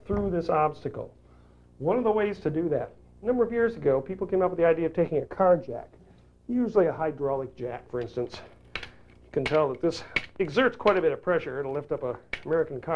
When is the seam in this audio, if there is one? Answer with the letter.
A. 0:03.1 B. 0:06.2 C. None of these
A